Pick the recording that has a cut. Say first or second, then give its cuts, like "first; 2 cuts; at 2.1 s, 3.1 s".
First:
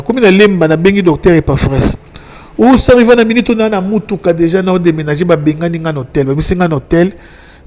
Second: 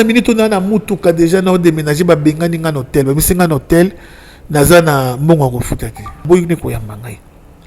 second; 1 cut; at 6.2 s